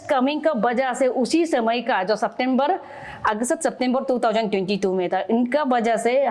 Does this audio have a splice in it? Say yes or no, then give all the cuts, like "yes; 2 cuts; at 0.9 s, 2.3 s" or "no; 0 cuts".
no; 0 cuts